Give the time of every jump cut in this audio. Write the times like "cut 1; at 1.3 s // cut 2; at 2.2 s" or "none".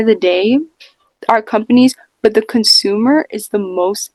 none